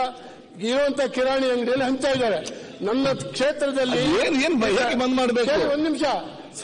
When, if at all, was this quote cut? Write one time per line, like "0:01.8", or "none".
none